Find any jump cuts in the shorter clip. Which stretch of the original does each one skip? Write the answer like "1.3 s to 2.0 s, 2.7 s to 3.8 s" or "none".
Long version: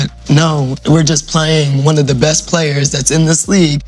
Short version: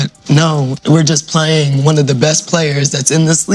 none